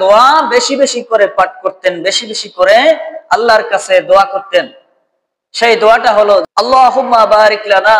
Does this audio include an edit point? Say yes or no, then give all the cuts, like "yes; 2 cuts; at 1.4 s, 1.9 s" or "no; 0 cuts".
yes; 1 cut; at 6.4 s